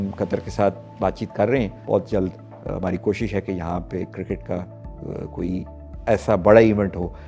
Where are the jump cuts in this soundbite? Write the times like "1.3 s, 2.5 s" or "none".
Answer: 1.8 s

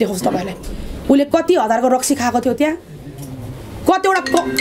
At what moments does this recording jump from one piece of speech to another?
none

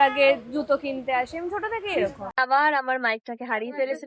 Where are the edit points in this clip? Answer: 2.2 s

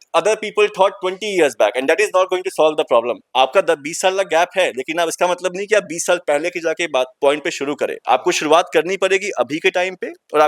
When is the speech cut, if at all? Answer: none

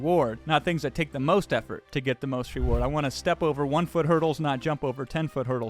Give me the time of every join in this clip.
none

